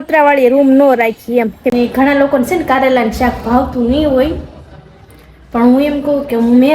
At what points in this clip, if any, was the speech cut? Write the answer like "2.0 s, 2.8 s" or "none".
1.7 s